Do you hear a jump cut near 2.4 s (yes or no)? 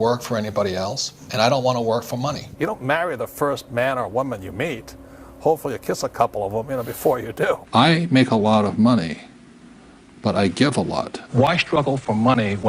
yes